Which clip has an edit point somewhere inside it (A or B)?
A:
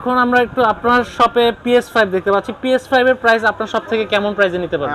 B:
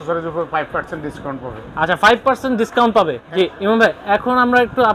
B